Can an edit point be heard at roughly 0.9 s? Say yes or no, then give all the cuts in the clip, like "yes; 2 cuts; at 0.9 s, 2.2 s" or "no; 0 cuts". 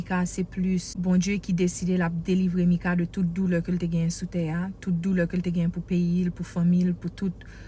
yes; 1 cut; at 0.9 s